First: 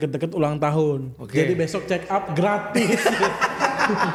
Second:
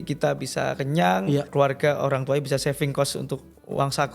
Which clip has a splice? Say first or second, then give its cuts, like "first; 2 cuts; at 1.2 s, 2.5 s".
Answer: second; 1 cut; at 1.5 s